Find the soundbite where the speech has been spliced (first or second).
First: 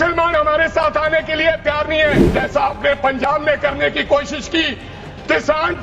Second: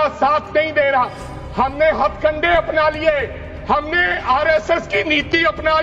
first